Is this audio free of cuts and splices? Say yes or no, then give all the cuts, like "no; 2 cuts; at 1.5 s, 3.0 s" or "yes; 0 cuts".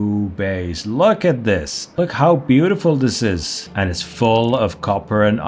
no; 2 cuts; at 1.8 s, 3.7 s